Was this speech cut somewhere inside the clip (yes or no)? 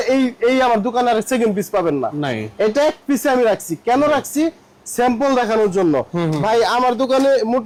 no